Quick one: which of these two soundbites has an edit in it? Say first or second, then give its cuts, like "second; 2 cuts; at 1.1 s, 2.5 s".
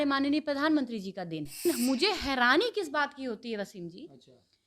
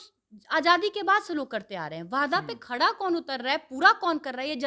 first; 1 cut; at 1.6 s